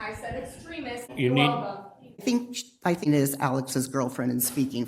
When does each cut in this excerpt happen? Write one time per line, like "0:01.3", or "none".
0:01.1
0:02.2
0:03.1